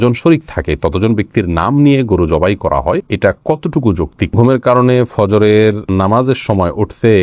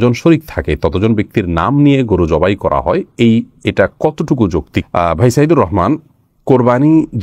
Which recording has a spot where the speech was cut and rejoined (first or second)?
first